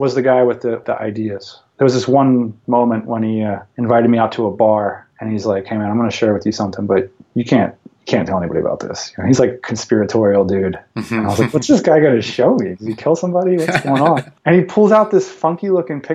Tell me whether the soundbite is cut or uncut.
cut